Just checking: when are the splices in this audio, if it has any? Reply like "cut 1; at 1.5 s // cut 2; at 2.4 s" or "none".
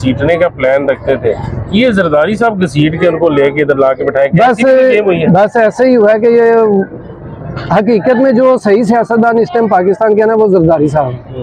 none